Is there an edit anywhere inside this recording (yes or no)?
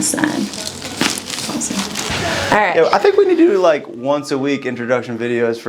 yes